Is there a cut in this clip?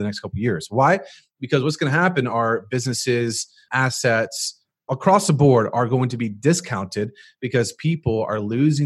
yes; 2 cuts; at 3.7 s, 4.9 s

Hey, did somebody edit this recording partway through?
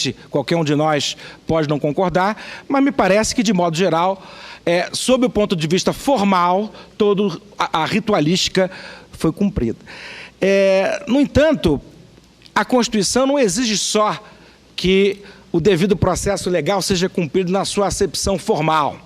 yes; 1 cut; at 16.0 s

